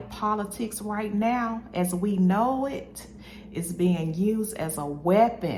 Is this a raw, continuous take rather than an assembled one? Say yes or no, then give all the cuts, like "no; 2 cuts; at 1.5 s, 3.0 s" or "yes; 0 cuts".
yes; 0 cuts